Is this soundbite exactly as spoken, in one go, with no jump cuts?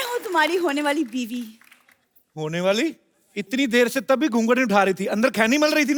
yes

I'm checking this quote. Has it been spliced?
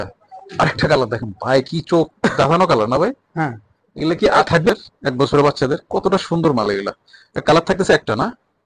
yes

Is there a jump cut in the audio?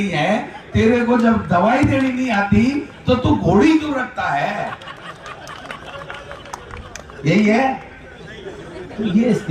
no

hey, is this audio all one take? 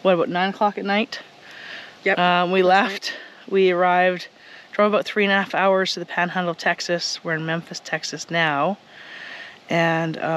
yes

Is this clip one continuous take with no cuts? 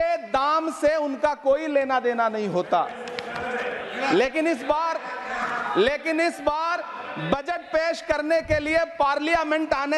yes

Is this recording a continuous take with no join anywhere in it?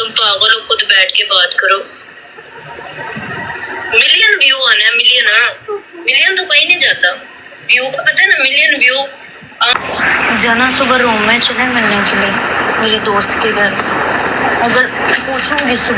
no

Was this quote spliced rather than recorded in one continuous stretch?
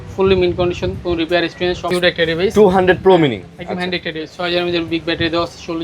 yes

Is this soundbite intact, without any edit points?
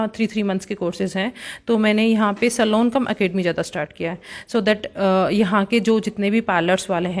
yes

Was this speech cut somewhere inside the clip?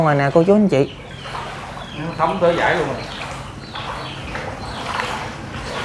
no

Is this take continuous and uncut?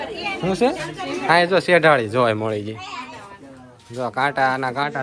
yes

